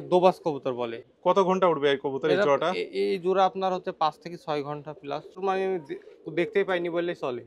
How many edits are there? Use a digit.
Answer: 2